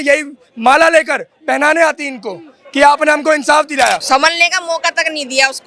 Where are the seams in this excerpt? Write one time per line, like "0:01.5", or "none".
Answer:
0:04.0